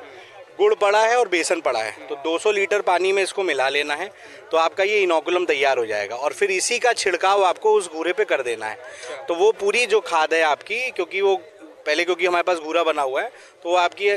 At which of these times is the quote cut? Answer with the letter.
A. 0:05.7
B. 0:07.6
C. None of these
C